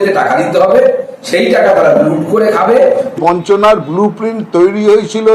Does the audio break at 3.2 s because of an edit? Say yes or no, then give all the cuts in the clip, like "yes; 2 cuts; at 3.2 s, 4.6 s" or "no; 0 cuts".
yes; 1 cut; at 3.2 s